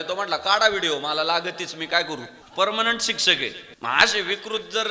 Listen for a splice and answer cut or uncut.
cut